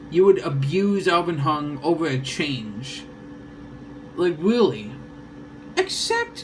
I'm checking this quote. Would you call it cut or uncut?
uncut